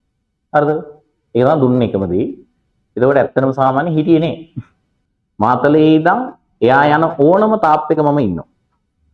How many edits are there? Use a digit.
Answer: 1